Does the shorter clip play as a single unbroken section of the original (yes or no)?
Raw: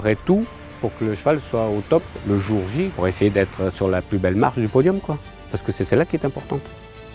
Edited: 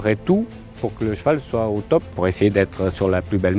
no